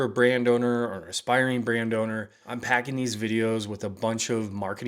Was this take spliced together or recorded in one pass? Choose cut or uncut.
uncut